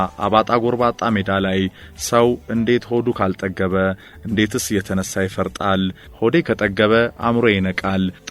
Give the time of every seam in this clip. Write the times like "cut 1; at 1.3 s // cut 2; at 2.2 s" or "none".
cut 1; at 6.1 s

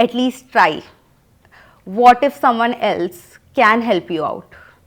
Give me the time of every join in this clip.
none

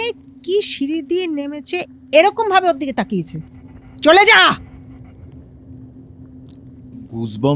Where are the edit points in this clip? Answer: none

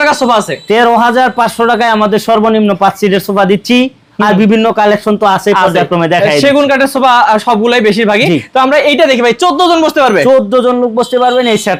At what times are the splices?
none

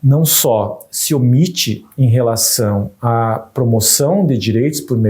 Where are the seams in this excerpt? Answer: none

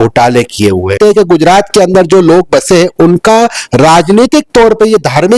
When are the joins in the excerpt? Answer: cut 1; at 1.0 s

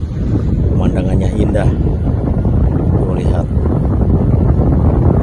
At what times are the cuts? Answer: none

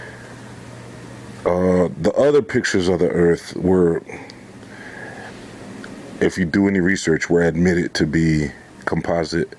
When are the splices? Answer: none

